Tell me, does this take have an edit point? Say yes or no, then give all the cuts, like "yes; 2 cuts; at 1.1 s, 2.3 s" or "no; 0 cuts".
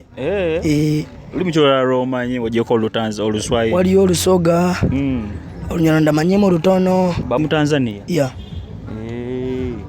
yes; 1 cut; at 7.4 s